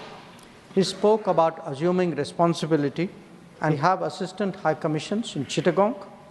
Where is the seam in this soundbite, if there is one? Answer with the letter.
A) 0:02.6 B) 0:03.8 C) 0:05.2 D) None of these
B